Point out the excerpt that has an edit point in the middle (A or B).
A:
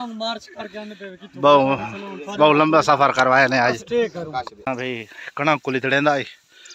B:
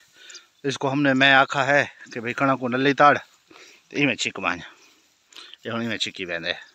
A